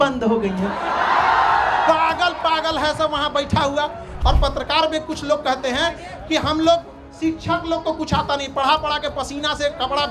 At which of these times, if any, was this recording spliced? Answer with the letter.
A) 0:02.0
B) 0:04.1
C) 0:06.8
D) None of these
B